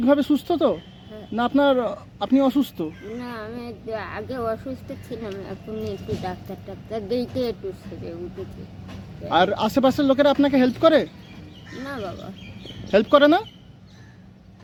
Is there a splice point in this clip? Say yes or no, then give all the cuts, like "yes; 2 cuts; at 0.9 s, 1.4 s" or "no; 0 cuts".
no; 0 cuts